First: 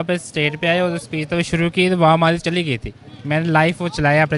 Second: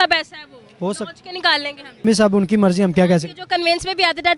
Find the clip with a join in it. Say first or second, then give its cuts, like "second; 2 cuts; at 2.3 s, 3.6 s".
second; 1 cut; at 2.0 s